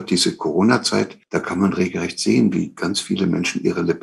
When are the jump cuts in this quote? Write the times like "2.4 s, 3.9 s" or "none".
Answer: 1.2 s